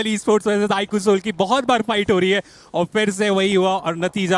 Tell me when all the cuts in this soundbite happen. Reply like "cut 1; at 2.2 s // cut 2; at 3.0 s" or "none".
none